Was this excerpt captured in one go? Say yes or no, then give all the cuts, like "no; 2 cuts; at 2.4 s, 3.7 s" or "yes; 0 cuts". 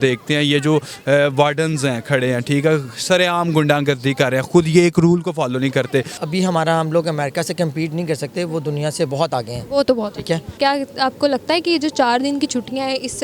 no; 2 cuts; at 6.2 s, 10.6 s